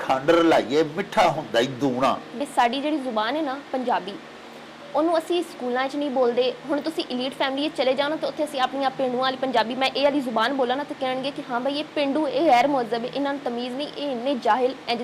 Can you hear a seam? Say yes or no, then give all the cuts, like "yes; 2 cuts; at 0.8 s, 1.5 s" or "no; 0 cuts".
yes; 1 cut; at 2.4 s